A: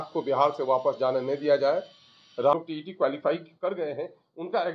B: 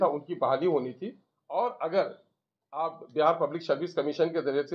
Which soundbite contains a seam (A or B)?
A